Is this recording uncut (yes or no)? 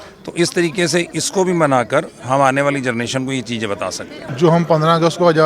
no